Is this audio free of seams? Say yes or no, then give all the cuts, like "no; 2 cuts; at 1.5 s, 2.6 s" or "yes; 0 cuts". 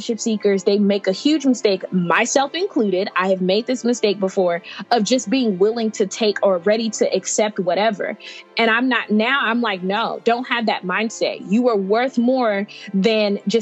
yes; 0 cuts